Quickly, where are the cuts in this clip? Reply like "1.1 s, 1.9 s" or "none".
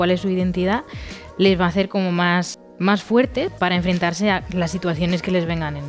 2.6 s, 3.5 s